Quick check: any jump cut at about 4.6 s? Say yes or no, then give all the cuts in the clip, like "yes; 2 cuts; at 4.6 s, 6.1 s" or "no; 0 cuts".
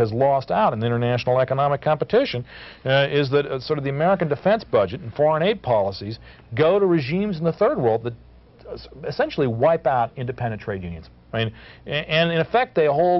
no; 0 cuts